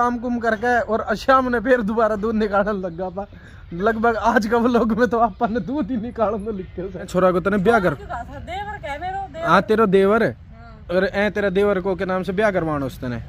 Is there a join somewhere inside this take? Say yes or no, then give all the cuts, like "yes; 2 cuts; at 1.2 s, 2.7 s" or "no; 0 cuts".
yes; 1 cut; at 7.1 s